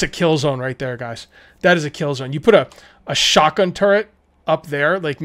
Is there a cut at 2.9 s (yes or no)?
no